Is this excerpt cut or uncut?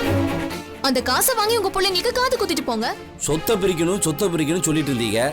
cut